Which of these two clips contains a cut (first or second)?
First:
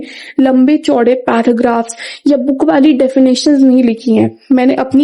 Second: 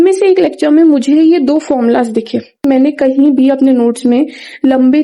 second